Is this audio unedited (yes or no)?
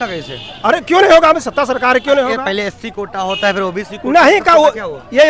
yes